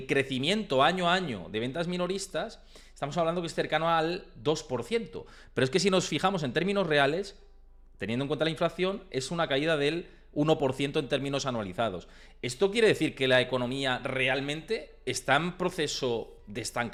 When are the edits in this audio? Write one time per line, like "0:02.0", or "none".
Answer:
none